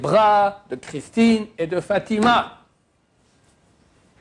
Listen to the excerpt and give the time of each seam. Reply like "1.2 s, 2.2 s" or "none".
none